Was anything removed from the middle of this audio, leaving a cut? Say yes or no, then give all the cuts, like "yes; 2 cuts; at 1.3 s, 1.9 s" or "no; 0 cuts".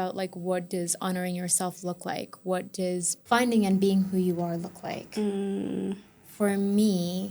yes; 1 cut; at 3.1 s